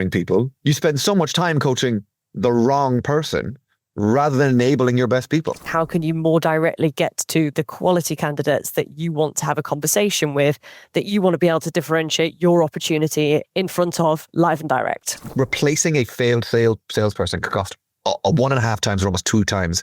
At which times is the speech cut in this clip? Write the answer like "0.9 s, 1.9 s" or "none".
5.7 s, 15.3 s